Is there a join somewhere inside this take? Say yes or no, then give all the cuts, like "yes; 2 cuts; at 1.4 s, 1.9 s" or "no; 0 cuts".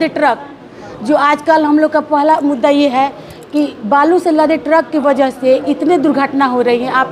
no; 0 cuts